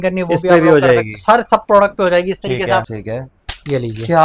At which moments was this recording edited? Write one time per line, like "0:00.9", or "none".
0:02.9